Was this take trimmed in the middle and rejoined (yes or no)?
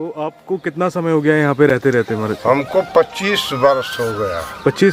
no